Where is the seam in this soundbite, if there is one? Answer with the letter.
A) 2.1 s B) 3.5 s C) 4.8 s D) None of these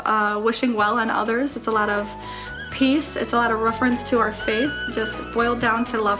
C